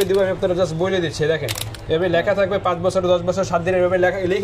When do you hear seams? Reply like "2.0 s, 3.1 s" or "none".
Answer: 1.7 s